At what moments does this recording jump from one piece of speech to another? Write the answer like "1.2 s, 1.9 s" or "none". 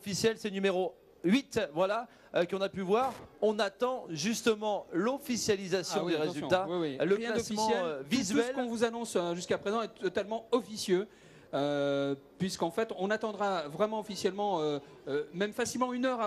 none